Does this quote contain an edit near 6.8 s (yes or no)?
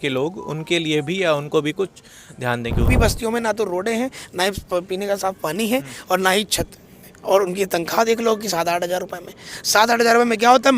no